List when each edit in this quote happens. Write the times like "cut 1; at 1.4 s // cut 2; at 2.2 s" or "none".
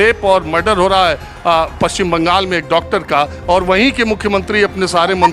none